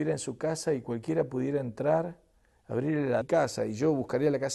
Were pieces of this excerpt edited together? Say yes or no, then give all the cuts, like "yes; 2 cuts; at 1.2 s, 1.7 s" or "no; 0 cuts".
no; 0 cuts